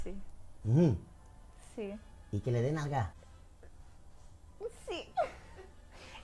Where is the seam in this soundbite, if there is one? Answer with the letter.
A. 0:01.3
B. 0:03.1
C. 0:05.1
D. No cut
B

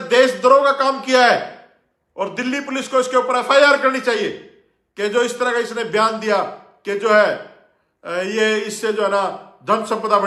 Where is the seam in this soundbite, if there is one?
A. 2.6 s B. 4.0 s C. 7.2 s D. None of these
D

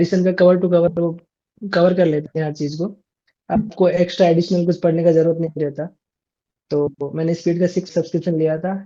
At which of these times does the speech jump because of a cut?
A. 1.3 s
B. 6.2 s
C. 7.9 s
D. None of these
C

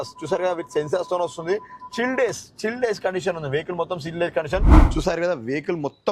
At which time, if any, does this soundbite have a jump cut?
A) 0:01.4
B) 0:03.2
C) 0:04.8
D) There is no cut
C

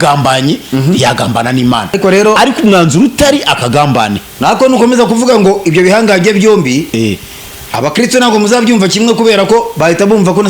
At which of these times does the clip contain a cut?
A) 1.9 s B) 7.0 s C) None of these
A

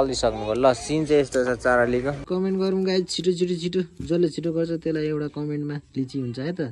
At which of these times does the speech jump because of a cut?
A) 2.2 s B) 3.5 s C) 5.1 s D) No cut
A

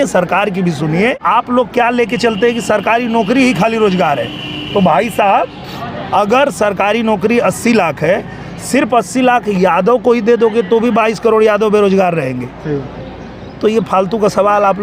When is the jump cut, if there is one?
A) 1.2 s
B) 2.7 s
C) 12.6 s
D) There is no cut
A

